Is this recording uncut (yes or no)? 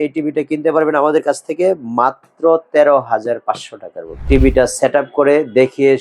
no